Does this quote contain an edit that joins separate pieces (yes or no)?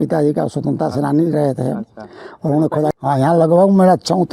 yes